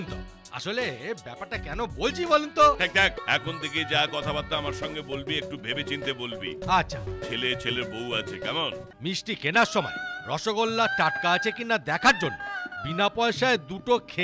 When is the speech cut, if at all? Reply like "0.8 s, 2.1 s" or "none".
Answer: 3.2 s, 8.9 s